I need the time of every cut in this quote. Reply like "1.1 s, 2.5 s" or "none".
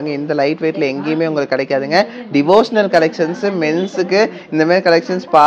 none